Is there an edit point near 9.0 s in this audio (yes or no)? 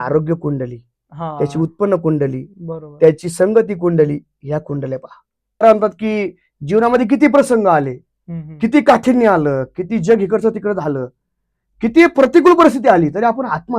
no